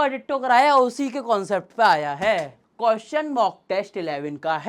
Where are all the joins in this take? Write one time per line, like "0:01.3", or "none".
0:02.6